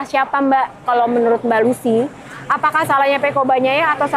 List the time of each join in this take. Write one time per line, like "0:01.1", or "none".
none

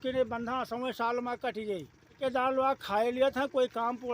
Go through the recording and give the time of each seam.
0:02.2

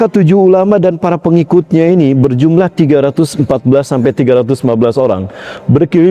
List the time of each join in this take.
none

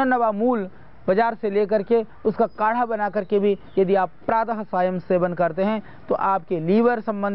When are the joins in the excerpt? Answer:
none

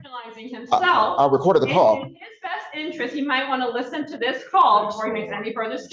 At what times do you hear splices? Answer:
none

